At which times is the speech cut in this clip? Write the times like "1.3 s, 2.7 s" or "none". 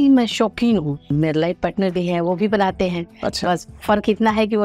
1.1 s